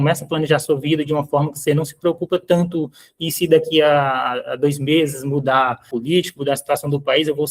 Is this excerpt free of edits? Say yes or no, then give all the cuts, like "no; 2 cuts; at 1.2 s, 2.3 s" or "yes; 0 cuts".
no; 1 cut; at 5.9 s